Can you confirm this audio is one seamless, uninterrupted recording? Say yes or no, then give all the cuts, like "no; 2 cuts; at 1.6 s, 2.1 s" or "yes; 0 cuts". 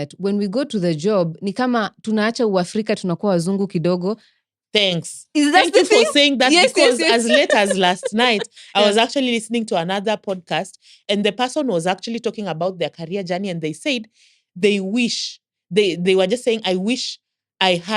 no; 1 cut; at 11.0 s